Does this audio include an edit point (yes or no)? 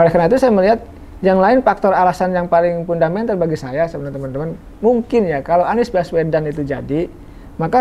no